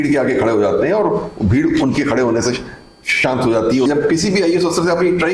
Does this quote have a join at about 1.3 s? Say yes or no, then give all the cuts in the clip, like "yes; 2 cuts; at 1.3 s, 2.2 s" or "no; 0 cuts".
no; 1 cut; at 3.9 s